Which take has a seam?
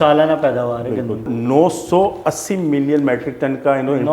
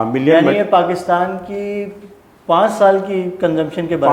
first; 1 cut; at 1.3 s

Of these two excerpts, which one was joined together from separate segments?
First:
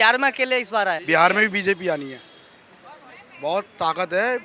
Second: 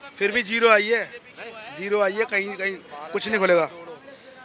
first; 1 cut; at 1.0 s

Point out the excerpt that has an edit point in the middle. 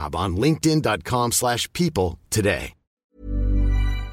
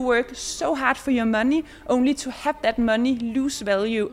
first; 1 cut; at 3.1 s

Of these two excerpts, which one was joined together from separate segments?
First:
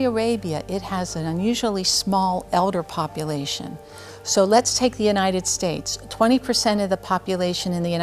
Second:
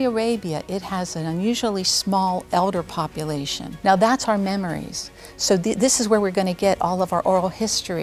second; 1 cut; at 3.6 s

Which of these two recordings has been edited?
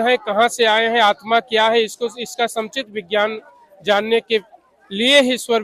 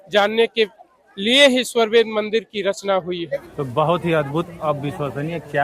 second; 1 cut; at 3.5 s

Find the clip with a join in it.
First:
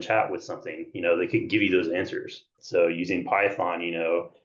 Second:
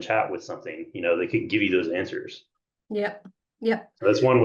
first; 1 cut; at 2.6 s

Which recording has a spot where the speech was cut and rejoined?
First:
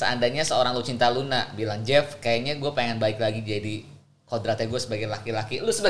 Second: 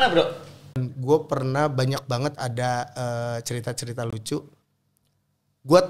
second; 1 cut; at 0.9 s

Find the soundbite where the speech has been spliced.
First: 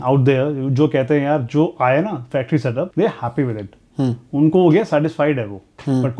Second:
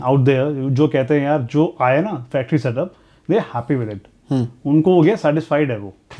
first; 1 cut; at 2.9 s

